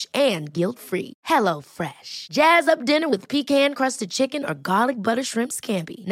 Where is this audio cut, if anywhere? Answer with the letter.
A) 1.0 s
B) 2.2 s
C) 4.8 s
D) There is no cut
D